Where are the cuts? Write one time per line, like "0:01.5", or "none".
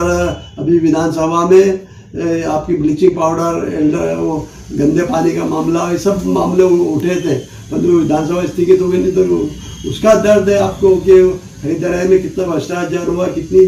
none